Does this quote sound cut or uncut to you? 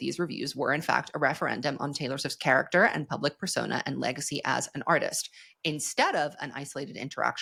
uncut